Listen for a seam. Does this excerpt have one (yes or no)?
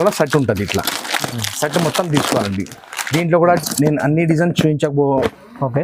yes